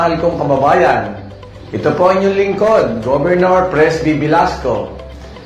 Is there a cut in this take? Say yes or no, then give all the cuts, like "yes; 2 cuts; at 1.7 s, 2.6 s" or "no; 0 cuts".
no; 0 cuts